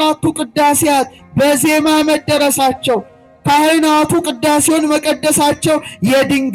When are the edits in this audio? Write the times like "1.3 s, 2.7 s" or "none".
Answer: none